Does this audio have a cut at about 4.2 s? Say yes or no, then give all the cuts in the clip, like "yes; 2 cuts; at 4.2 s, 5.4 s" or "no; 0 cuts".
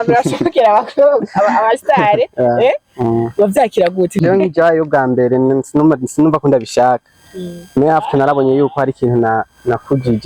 yes; 1 cut; at 4.2 s